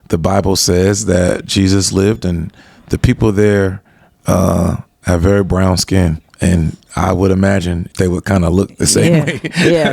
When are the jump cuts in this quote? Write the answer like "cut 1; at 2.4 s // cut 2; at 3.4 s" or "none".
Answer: cut 1; at 6.2 s // cut 2; at 7.8 s